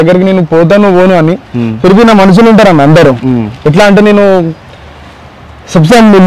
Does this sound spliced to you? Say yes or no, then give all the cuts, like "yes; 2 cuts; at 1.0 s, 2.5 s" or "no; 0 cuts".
no; 0 cuts